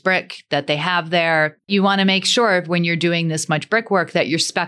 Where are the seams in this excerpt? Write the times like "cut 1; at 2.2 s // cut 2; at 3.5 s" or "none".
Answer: cut 1; at 1.7 s